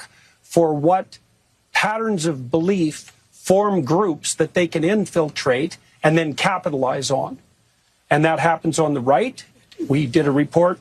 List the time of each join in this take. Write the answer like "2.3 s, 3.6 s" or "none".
none